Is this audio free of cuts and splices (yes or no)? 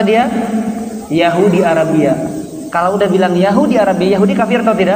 yes